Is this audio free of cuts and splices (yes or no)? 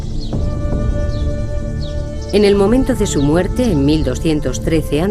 no